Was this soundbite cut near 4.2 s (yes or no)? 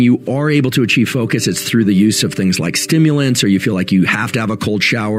no